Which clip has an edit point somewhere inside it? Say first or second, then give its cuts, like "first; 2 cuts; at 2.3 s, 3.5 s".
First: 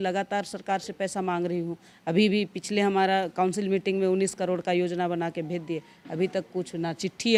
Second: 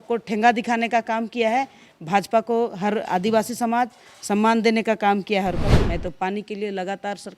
second; 1 cut; at 5.6 s